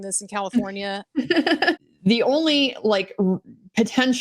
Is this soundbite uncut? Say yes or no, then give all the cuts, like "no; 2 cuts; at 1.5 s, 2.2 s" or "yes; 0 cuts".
no; 1 cut; at 1.8 s